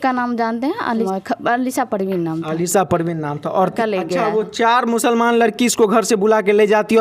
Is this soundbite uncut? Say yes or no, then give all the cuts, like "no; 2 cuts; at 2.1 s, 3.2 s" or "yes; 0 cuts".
no; 2 cuts; at 1.1 s, 3.7 s